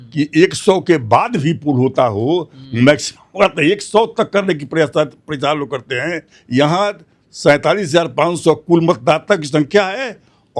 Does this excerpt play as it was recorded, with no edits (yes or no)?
yes